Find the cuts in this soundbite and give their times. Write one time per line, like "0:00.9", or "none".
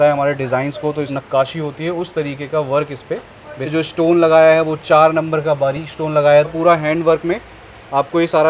0:01.1
0:03.7
0:06.5